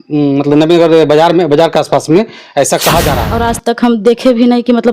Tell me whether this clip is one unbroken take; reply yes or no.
no